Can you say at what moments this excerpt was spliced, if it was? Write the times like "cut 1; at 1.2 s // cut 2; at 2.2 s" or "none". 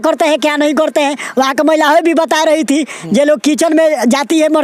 none